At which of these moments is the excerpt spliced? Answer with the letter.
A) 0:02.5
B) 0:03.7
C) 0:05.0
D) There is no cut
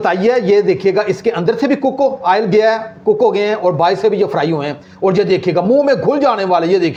D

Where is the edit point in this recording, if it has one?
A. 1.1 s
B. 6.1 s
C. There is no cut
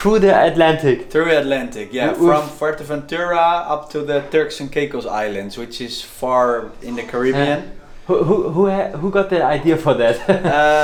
C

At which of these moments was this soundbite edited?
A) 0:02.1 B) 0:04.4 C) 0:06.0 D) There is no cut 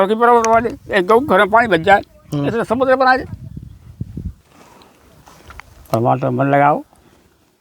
B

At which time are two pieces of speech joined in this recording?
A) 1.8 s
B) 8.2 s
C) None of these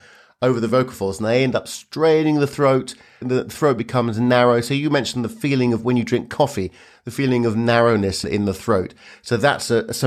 B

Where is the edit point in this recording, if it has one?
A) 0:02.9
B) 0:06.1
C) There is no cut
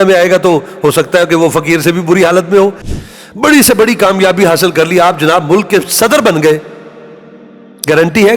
A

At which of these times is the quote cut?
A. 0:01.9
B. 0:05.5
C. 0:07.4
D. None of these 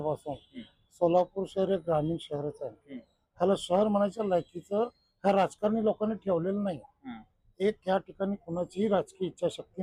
D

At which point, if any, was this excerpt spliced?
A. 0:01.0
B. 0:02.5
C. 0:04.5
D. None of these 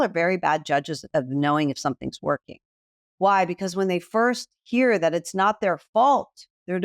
A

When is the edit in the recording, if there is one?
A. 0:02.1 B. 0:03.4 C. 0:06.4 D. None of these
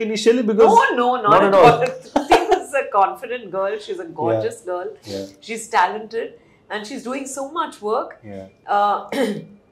D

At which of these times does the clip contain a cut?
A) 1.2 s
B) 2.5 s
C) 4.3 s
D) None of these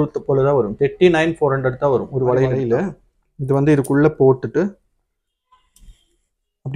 B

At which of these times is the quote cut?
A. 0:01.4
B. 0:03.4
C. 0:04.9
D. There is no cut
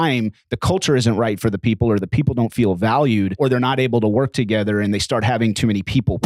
B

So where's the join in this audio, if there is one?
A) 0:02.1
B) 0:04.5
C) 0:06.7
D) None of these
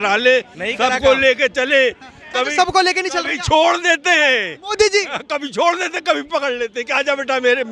D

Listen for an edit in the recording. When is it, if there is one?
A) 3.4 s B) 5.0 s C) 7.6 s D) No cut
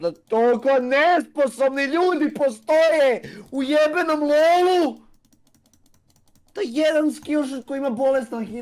D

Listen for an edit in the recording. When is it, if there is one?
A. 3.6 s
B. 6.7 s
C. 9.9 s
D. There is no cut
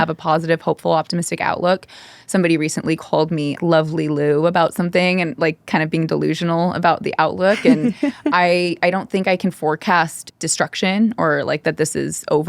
A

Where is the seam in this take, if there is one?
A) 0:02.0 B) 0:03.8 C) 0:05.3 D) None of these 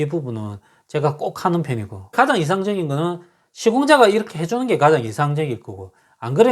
A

